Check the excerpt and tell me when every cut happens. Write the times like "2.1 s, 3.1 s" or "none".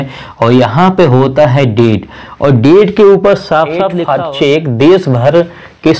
3.9 s